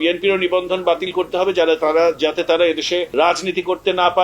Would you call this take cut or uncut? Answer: cut